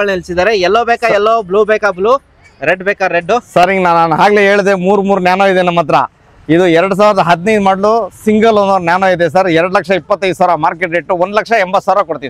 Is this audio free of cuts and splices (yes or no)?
yes